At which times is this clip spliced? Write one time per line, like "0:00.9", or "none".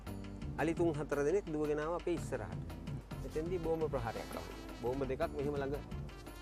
0:02.9